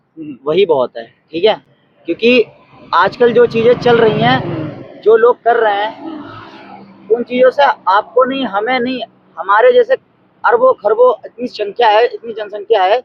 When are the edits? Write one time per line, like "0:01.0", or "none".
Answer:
none